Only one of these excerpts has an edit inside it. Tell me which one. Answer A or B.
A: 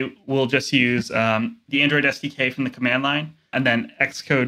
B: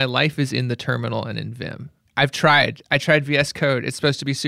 A